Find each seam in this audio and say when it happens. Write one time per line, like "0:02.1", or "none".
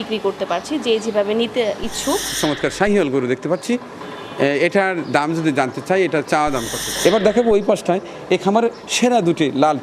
0:02.3
0:06.8